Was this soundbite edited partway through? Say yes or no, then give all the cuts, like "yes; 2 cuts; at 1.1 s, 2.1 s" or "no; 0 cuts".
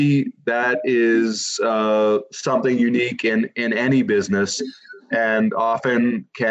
no; 0 cuts